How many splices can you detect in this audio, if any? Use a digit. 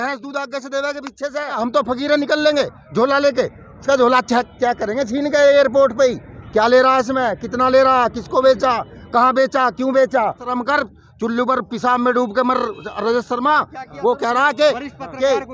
2